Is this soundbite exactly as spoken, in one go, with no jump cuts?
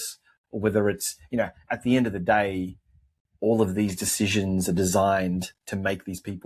yes; 0 cuts

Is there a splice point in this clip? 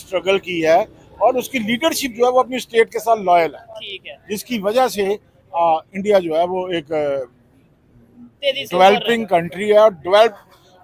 no; 0 cuts

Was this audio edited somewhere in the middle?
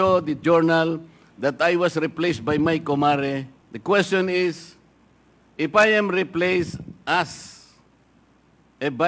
no; 0 cuts

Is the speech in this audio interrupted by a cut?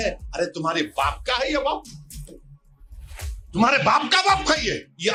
no; 0 cuts

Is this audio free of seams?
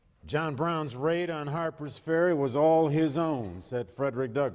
yes; 0 cuts

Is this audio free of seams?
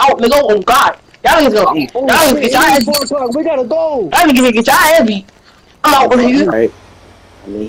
no; 1 cut; at 6.5 s

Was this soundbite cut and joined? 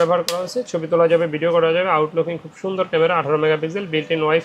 no; 0 cuts

